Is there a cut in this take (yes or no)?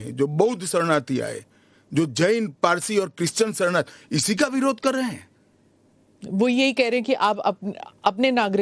no